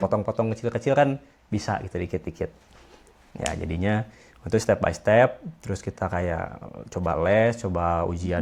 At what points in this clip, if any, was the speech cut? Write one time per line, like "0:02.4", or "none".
none